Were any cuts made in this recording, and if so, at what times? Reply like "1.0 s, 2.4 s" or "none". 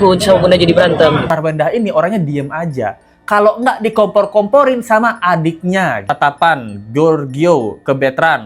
1.2 s, 6.1 s